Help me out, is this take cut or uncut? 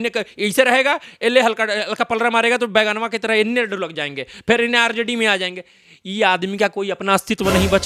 uncut